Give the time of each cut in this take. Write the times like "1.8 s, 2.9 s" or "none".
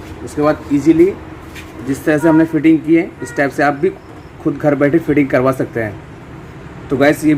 none

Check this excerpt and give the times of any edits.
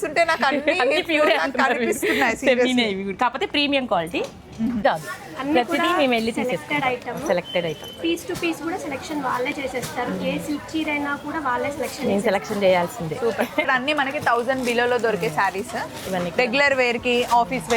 4.8 s, 13.7 s

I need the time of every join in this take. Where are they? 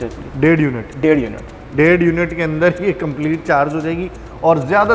none

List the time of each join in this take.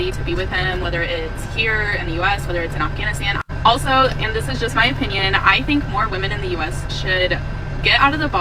none

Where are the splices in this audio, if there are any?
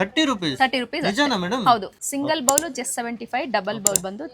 1.9 s

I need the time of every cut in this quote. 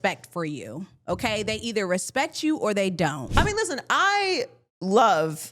3.2 s

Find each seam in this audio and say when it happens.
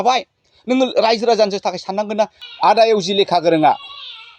2.4 s

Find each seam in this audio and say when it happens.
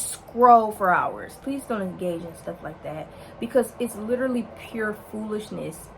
1.3 s

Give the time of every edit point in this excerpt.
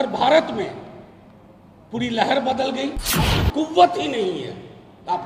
3.4 s

